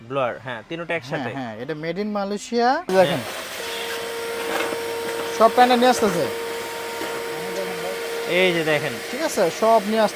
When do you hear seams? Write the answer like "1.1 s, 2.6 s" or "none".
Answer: 2.9 s